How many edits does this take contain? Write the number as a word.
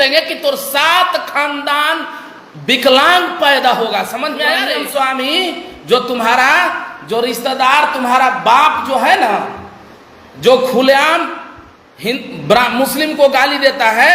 one